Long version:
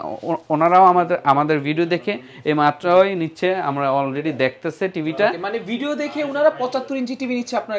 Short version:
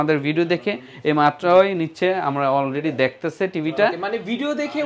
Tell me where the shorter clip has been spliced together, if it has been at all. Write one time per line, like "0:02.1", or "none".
none